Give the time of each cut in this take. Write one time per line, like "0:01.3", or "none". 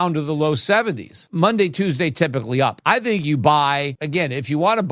0:01.1
0:02.8
0:04.0